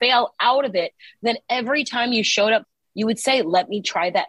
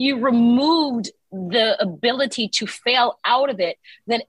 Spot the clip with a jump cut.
first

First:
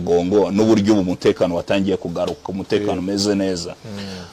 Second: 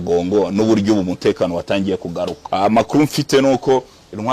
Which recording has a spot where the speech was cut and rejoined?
second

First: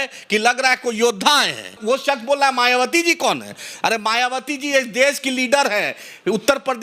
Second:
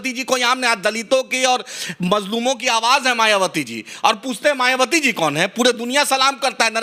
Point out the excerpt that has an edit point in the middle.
first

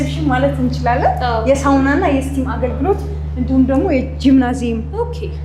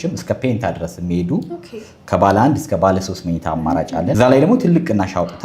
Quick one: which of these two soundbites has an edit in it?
second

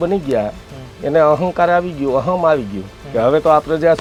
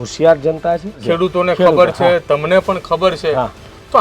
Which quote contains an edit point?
second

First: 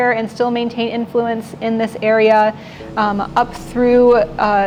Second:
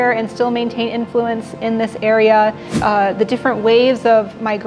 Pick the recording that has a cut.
second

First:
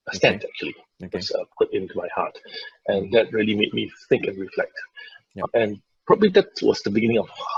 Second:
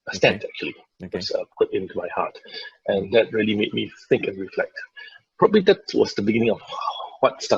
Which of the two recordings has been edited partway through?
second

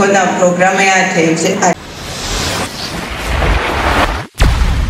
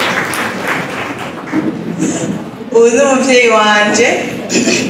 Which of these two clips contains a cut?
first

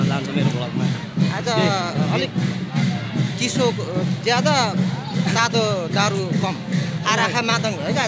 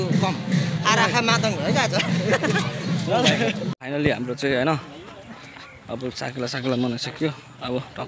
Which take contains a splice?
second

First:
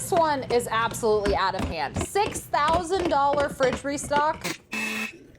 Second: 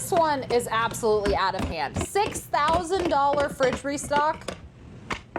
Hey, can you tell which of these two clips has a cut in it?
first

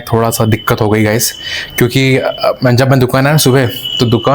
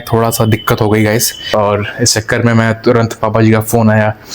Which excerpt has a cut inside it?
second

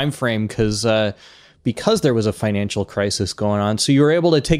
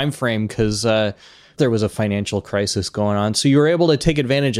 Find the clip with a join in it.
second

